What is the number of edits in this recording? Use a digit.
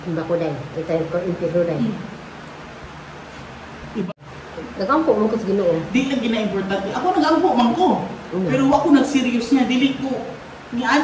1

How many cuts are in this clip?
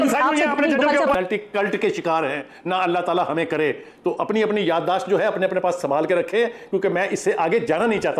1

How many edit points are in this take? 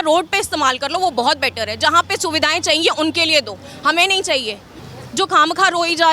1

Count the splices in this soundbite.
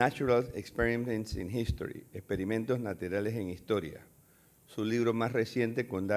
0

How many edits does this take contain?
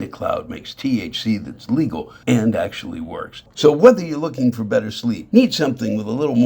3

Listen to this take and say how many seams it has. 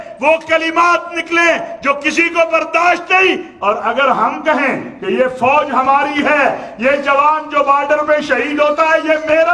0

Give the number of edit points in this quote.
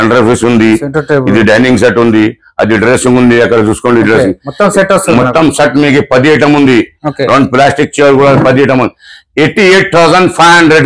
0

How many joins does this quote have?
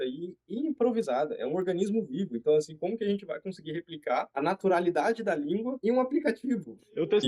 0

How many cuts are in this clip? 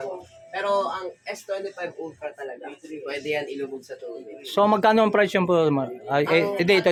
0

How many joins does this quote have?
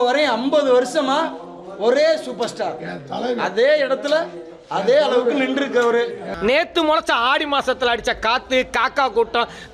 1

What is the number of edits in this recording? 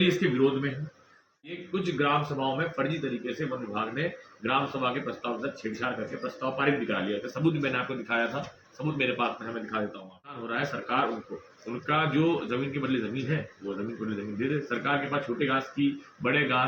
2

